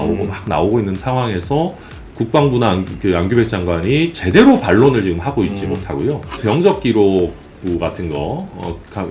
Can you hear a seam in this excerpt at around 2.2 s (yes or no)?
no